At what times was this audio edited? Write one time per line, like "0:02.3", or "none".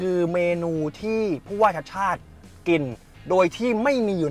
none